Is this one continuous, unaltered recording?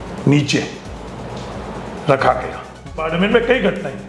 no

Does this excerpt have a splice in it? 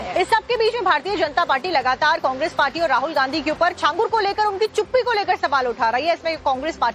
yes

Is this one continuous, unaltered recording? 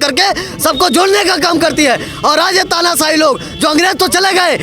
yes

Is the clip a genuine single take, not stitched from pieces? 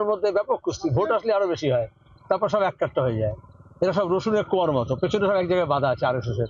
yes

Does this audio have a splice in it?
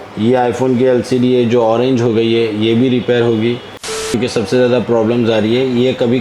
yes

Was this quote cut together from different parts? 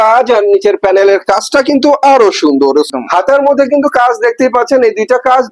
yes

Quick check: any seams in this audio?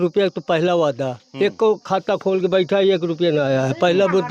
no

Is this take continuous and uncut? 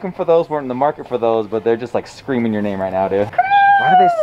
no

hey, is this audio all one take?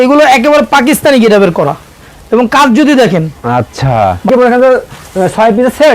no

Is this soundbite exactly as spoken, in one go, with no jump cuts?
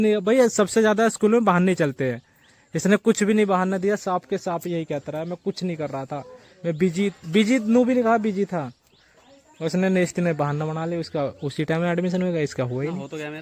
yes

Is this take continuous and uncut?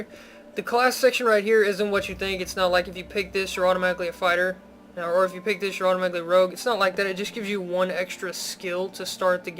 no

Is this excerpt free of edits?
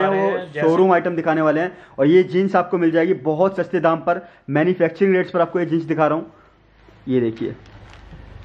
yes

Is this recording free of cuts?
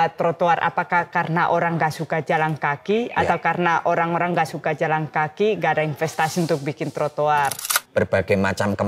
no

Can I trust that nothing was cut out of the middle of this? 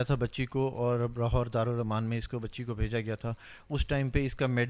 yes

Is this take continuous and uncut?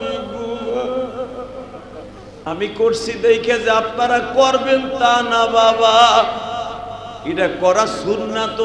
yes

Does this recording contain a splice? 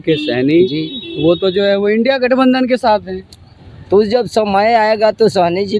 no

